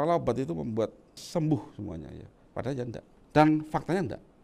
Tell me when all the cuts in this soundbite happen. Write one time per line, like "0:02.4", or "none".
0:01.2
0:03.1